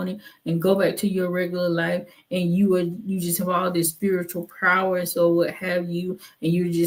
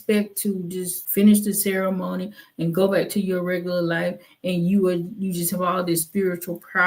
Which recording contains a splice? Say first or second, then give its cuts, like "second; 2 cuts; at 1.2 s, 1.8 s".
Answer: second; 1 cut; at 1.0 s